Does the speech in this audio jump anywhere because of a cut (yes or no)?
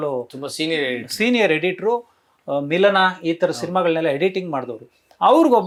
no